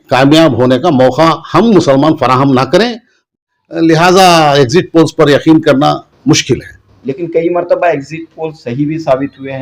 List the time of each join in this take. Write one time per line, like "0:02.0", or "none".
0:03.2